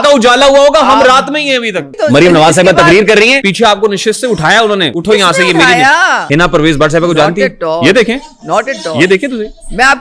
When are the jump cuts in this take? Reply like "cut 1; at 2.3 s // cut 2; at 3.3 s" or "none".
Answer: cut 1; at 1.9 s // cut 2; at 3.4 s // cut 3; at 4.9 s // cut 4; at 6.2 s